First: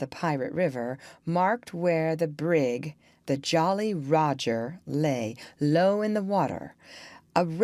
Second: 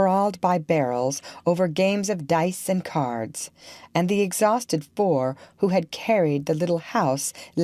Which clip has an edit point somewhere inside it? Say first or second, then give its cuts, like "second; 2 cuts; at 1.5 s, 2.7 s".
first; 1 cut; at 6.7 s